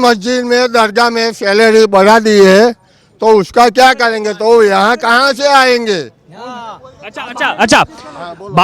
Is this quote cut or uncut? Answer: uncut